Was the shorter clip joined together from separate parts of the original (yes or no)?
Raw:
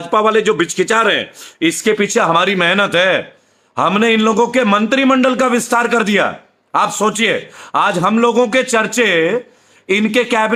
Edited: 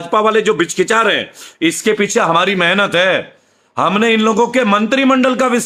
no